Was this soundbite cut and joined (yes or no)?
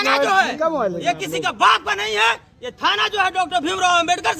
no